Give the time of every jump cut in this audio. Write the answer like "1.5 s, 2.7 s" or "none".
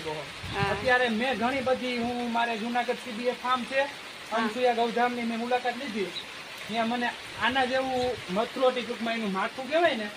none